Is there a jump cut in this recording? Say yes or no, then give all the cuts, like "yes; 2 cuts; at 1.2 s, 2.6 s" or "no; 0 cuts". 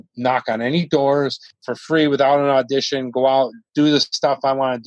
no; 0 cuts